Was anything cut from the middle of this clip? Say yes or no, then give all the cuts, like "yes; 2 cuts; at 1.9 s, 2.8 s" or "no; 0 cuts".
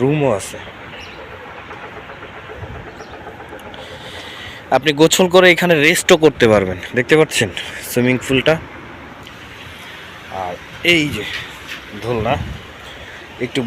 yes; 1 cut; at 9.3 s